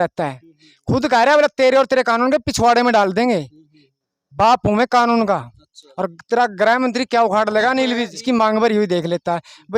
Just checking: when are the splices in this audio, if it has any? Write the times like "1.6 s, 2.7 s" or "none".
8.1 s